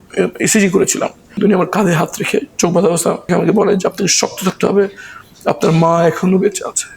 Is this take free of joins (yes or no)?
no